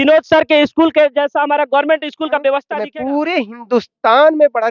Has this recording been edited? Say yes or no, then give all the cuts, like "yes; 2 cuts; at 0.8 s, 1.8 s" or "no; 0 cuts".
yes; 1 cut; at 2.8 s